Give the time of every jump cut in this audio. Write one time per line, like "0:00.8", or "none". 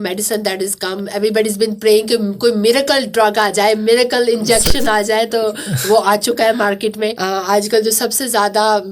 0:07.2